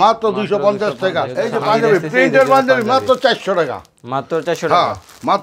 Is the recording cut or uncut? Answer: cut